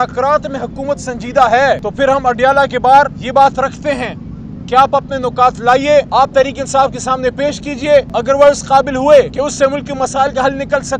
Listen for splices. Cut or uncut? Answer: cut